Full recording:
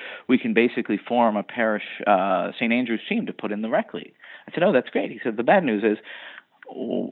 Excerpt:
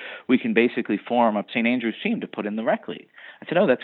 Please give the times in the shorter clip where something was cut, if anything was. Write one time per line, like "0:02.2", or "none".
0:01.5